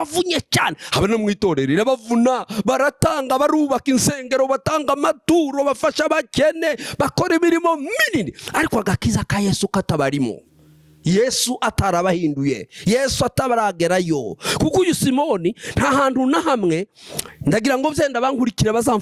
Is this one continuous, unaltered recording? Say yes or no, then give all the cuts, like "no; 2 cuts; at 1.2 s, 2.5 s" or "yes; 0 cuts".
yes; 0 cuts